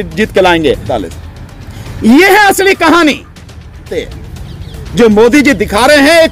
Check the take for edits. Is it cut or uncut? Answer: cut